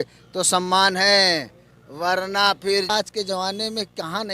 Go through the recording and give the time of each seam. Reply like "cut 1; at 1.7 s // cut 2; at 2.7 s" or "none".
cut 1; at 2.9 s